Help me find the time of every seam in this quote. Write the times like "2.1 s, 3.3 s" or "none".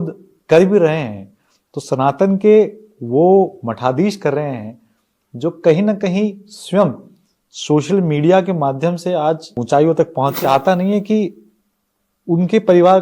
9.6 s, 10.4 s